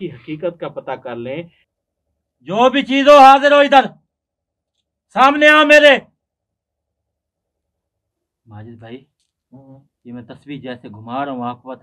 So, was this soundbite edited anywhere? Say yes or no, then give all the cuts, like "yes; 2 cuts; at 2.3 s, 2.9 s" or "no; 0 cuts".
yes; 2 cuts; at 1.6 s, 8.1 s